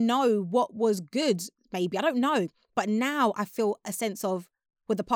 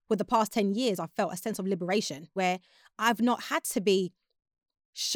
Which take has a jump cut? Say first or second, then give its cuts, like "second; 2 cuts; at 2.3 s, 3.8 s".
second; 1 cut; at 2.3 s